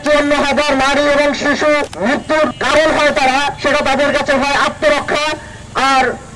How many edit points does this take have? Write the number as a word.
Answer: two